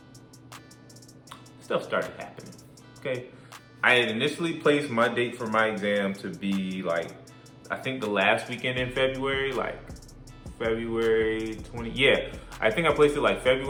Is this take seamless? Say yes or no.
yes